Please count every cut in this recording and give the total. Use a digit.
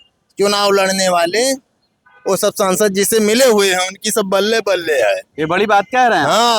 0